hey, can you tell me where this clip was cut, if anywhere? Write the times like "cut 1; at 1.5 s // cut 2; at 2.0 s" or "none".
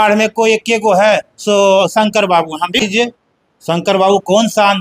cut 1; at 2.8 s

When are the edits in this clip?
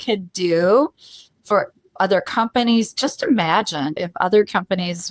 cut 1; at 4.0 s

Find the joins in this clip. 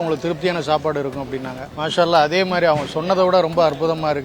cut 1; at 1.6 s

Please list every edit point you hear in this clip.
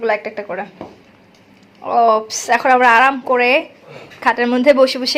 none

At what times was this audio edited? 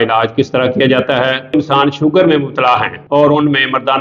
cut 1; at 1.5 s // cut 2; at 2.9 s

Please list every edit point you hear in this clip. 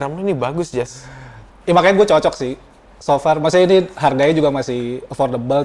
none

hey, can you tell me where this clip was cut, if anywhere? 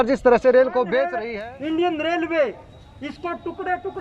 cut 1; at 1.1 s

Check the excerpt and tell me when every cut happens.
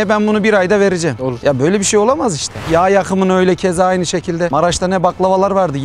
cut 1; at 2.6 s

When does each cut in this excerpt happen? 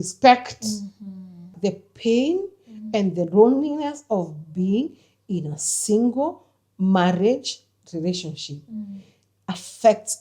cut 1; at 1.5 s

